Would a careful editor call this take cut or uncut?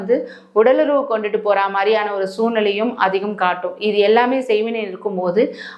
uncut